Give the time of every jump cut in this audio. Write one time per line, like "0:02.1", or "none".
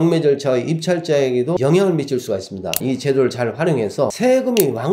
0:02.8
0:04.1